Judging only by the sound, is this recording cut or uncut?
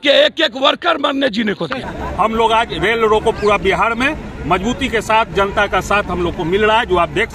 cut